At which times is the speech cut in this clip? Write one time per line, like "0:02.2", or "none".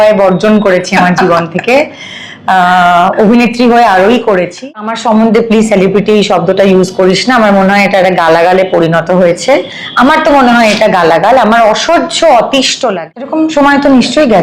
0:04.9
0:12.8